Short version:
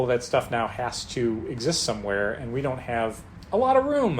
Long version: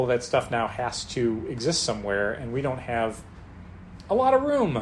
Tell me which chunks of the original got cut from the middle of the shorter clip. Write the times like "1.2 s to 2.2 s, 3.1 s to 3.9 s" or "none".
3.3 s to 3.9 s